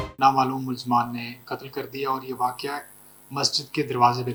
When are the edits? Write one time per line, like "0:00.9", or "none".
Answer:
none